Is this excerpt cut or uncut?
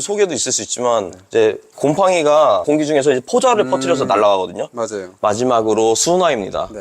cut